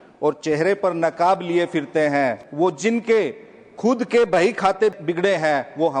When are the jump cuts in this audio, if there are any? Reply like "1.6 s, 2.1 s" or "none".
2.4 s, 5.0 s